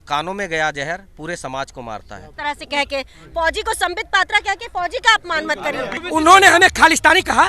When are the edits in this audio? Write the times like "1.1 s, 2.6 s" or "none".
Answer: 2.3 s, 6.0 s